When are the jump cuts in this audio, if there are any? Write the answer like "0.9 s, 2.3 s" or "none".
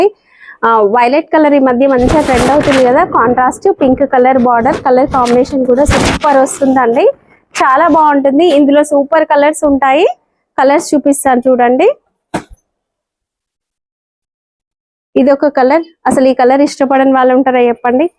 none